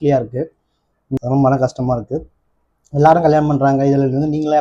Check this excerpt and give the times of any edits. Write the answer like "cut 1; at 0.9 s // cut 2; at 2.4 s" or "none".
cut 1; at 1.2 s